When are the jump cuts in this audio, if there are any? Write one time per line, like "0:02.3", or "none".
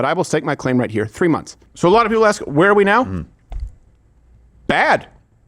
0:01.6